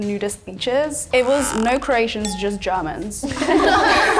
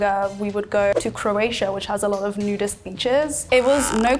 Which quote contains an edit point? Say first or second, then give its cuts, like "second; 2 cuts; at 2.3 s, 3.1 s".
second; 1 cut; at 0.9 s